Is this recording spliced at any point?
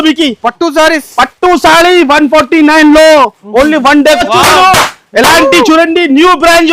yes; 1 cut; at 4.2 s

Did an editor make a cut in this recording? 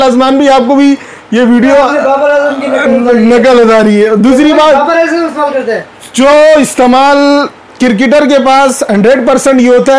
no; 0 cuts

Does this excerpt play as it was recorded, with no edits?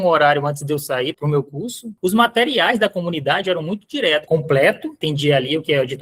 no; 3 cuts; at 1.9 s, 4.2 s, 5.0 s

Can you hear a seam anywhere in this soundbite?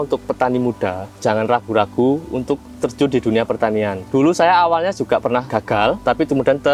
yes; 2 cuts; at 1.1 s, 5.7 s

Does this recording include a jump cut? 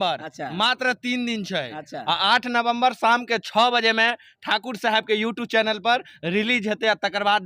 no; 0 cuts

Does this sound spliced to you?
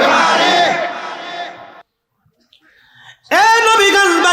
yes; 1 cut; at 1.9 s

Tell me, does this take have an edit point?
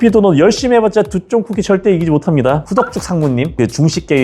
yes; 1 cut; at 2.7 s

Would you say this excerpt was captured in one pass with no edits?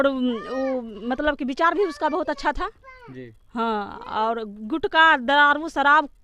yes; 0 cuts

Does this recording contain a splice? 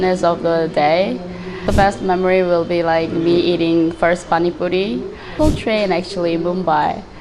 yes; 2 cuts; at 1.6 s, 5.3 s

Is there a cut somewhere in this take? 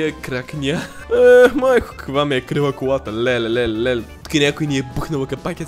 yes; 1 cut; at 0.9 s

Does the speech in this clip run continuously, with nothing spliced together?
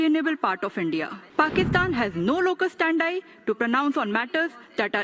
no; 1 cut; at 1.2 s

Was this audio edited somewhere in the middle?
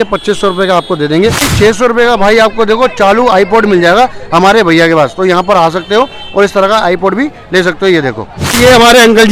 yes; 2 cuts; at 1.5 s, 8.5 s

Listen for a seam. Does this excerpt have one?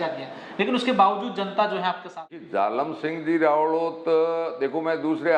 yes; 1 cut; at 2.5 s

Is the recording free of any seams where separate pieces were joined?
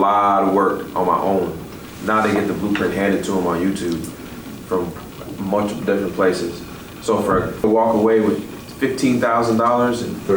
no; 1 cut; at 7.6 s

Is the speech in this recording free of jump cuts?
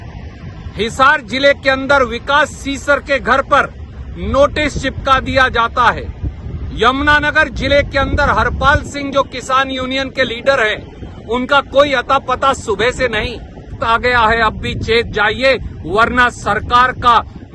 no; 1 cut; at 13.8 s

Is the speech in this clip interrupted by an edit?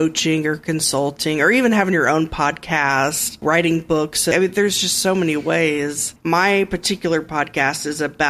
yes; 3 cuts; at 3.4 s, 4.3 s, 6.1 s

